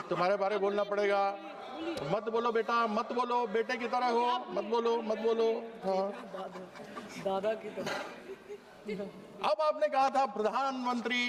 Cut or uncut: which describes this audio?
uncut